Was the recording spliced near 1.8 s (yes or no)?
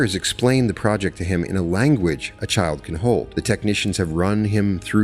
no